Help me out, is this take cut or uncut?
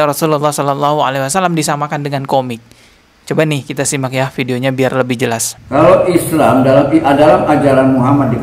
uncut